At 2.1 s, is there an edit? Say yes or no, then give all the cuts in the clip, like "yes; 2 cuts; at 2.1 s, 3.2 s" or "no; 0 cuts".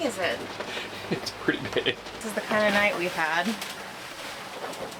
yes; 1 cut; at 2.1 s